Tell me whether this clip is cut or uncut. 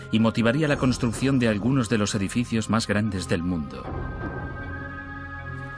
uncut